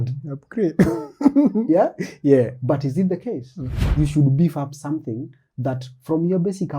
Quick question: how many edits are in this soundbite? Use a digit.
1